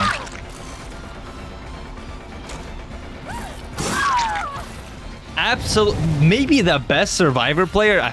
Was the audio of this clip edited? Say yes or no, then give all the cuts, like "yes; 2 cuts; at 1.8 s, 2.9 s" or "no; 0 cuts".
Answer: no; 0 cuts